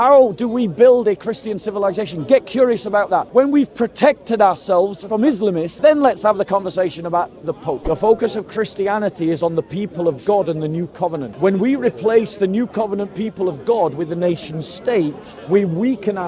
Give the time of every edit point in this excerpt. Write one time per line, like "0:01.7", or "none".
0:03.3
0:05.7
0:07.8
0:11.3
0:15.3